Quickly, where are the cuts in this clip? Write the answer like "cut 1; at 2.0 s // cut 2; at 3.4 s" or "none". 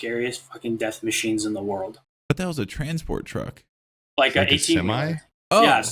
cut 1; at 2.1 s